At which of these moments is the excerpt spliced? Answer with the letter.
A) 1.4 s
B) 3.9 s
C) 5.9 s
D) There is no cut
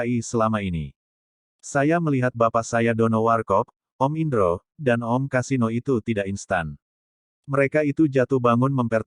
A